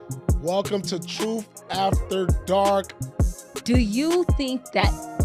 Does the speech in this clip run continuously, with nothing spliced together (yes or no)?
yes